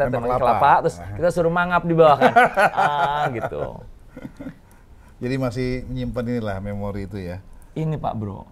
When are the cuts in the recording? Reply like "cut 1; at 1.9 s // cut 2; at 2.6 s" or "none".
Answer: none